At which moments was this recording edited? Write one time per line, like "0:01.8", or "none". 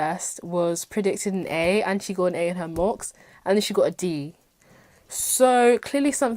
none